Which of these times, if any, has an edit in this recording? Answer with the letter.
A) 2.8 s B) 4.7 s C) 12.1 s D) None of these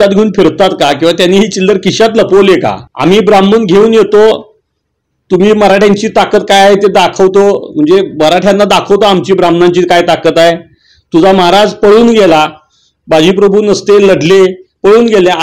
A